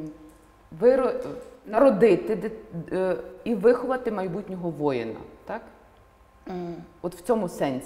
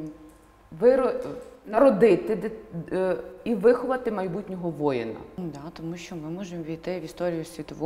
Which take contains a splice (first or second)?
second